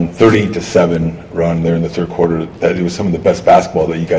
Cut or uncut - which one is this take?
uncut